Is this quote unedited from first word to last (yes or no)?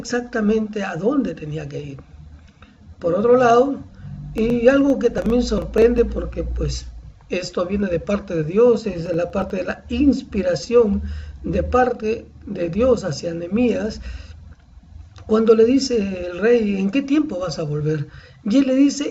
yes